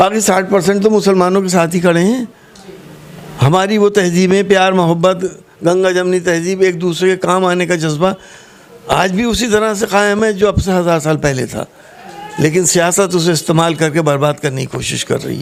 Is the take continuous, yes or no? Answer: yes